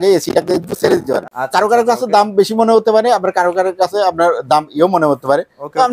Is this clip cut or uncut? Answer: cut